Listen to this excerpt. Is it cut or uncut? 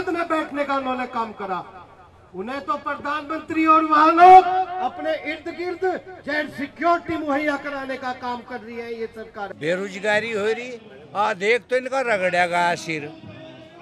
cut